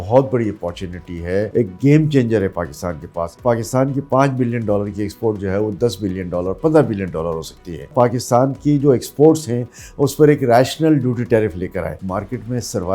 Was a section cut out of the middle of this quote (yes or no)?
yes